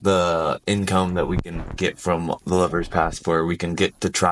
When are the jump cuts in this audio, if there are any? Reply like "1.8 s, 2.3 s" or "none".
none